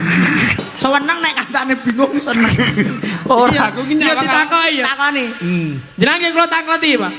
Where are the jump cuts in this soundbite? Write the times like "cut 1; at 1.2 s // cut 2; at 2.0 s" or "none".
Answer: none